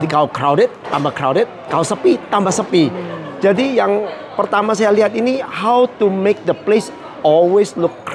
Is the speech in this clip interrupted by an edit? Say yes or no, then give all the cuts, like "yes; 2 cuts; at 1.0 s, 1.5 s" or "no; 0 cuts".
no; 0 cuts